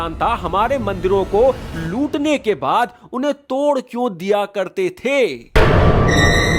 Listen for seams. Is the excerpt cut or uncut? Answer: uncut